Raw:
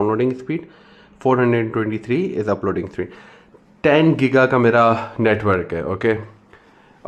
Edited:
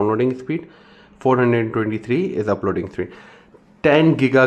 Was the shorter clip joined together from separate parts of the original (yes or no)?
no